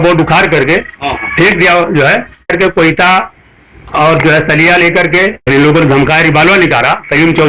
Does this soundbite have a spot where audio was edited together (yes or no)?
yes